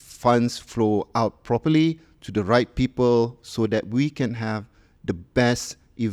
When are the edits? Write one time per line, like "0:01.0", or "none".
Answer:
none